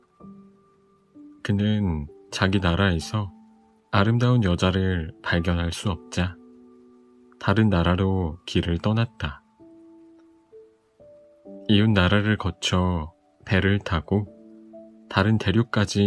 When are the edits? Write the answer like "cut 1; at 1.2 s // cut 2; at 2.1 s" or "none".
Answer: cut 1; at 9.9 s // cut 2; at 11.7 s